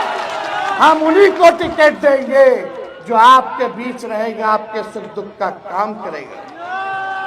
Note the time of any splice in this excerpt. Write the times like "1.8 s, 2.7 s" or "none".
none